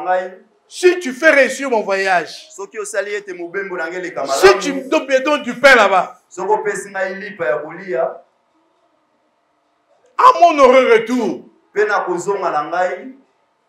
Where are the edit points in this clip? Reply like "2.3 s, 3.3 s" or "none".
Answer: none